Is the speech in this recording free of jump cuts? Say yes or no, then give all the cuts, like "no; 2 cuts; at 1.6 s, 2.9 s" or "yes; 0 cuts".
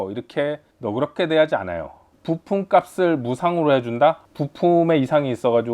no; 2 cuts; at 2.1 s, 4.3 s